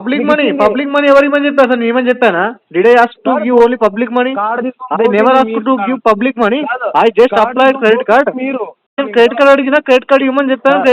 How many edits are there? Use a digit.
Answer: 1